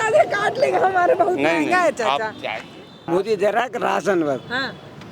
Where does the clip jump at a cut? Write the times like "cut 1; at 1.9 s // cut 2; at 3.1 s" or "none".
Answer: cut 1; at 3.0 s